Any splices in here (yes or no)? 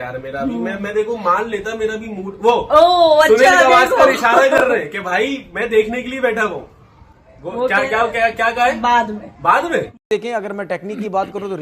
yes